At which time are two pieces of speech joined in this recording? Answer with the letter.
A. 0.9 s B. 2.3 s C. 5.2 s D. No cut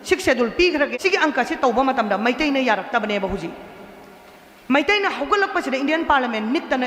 A